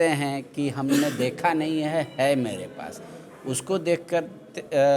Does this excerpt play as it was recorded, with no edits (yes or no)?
yes